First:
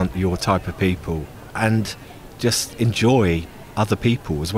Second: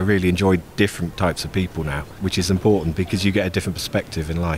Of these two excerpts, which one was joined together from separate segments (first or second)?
first